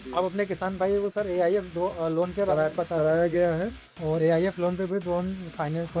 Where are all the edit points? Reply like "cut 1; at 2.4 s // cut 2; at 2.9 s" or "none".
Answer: none